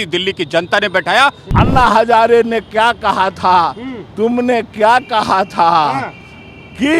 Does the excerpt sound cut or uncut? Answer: cut